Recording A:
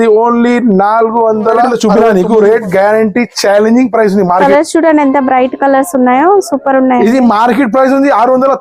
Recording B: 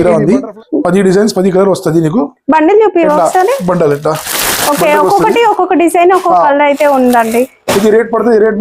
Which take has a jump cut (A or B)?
A